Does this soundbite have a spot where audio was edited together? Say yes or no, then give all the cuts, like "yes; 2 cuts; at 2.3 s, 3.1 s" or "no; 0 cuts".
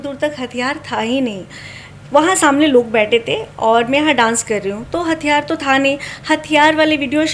no; 0 cuts